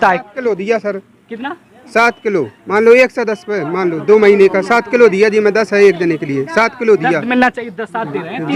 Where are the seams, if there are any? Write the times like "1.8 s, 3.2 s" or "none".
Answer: none